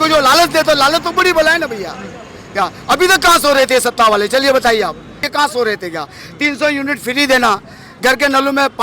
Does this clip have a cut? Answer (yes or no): yes